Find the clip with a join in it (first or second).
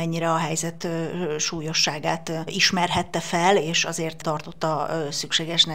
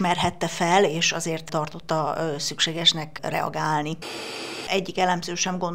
second